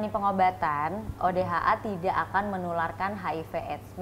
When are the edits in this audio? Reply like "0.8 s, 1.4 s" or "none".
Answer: none